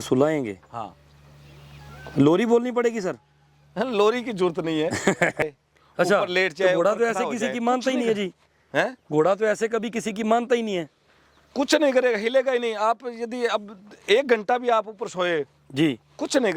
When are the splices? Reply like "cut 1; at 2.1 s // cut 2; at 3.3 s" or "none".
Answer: cut 1; at 5.5 s